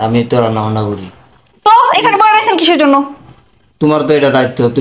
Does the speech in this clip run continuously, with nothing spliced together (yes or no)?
yes